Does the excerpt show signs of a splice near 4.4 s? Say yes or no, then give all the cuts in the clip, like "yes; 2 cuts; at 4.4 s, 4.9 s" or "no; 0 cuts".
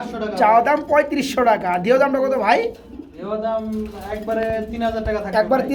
no; 0 cuts